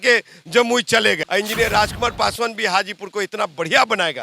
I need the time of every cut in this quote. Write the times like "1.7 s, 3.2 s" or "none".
1.2 s